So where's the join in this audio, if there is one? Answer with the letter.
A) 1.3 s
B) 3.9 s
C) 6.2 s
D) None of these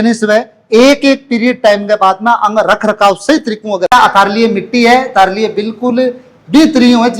B